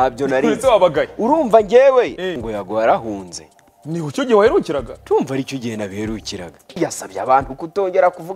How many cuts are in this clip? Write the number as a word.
two